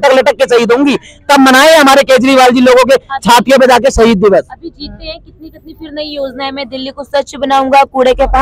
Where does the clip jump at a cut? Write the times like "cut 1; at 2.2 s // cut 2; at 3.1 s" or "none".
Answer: none

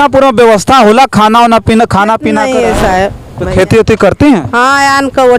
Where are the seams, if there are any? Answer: cut 1; at 2.4 s

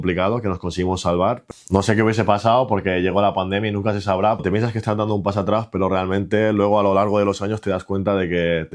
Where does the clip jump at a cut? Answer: cut 1; at 1.4 s // cut 2; at 4.4 s

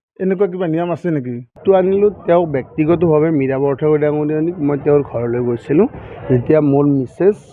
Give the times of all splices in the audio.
cut 1; at 1.5 s

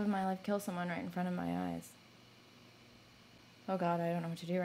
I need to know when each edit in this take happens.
cut 1; at 3.4 s

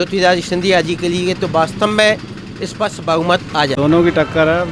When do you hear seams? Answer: cut 1; at 3.8 s

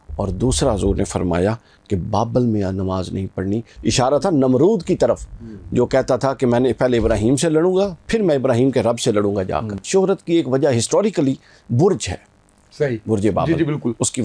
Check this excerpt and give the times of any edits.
cut 1; at 3.7 s // cut 2; at 9.9 s

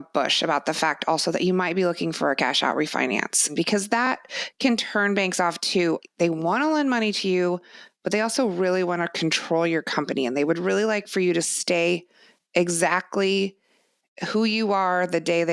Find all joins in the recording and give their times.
cut 1; at 3.5 s // cut 2; at 6.0 s

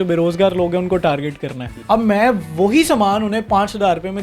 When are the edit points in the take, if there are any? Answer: cut 1; at 1.7 s

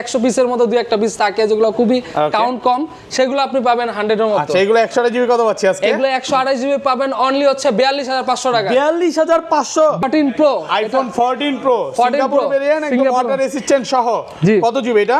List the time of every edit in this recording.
cut 1; at 10.0 s

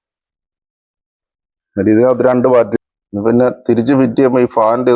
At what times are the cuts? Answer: cut 1; at 2.7 s

